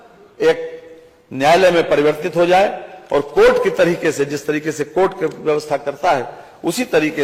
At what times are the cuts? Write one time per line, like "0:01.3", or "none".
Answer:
none